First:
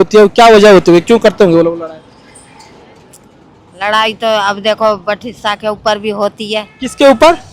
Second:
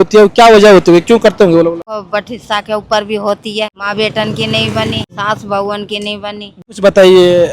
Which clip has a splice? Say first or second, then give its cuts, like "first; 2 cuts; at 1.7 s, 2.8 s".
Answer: second; 4 cuts; at 2.0 s, 3.8 s, 5.1 s, 6.6 s